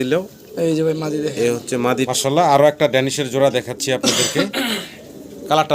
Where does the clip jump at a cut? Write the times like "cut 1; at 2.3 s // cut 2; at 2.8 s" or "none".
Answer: cut 1; at 2.1 s